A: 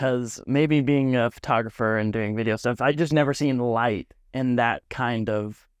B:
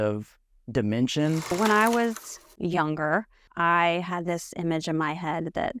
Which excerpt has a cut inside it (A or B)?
B